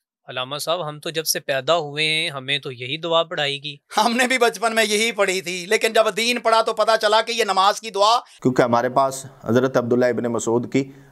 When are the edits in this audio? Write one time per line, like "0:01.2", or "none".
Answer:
0:08.3